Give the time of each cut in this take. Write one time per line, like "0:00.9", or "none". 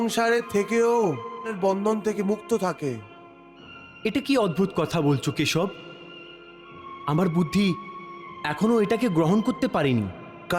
0:01.5